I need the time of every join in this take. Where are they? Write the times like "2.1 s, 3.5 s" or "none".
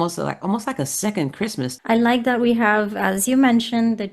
1.7 s

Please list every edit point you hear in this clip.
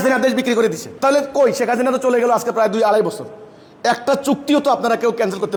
none

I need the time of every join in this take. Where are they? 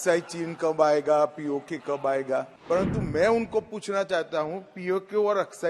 2.5 s

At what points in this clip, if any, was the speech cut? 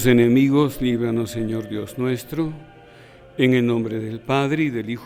none

